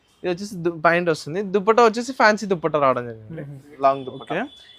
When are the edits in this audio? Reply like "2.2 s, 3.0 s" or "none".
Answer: 3.7 s